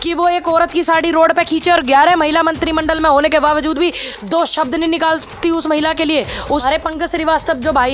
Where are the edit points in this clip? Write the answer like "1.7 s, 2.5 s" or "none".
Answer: 6.6 s

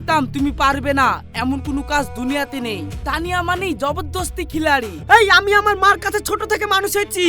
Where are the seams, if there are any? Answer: 4.9 s

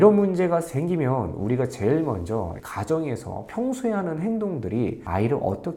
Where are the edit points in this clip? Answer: none

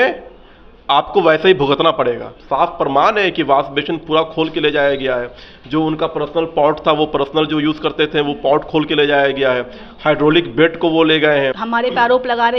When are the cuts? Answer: 2.4 s, 11.6 s

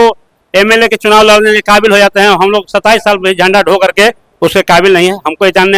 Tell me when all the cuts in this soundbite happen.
none

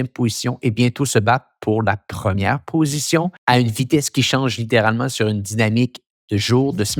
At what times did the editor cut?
3.4 s

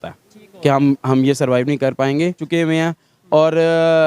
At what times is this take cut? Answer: 2.4 s

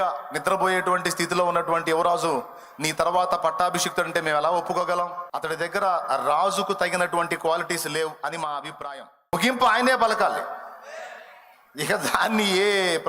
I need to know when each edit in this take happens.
5.3 s, 9.3 s

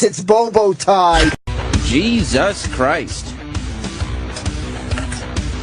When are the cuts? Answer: 1.1 s

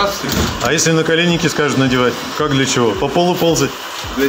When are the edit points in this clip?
2.3 s

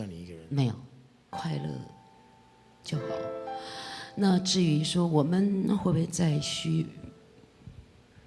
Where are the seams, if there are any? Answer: 1.3 s

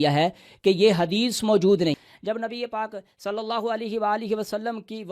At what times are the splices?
2.1 s

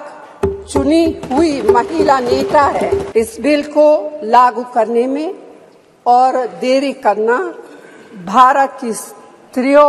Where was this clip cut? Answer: 3.1 s

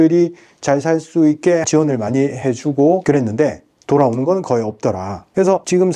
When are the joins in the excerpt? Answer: 1.7 s

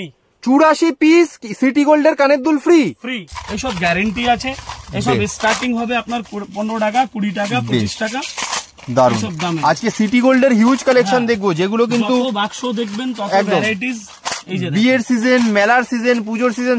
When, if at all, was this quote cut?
3.3 s

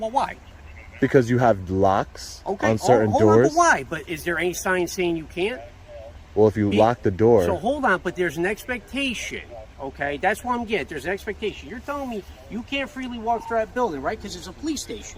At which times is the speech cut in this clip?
none

